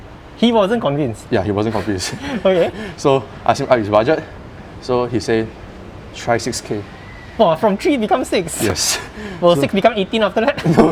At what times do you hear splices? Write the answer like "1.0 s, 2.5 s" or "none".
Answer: none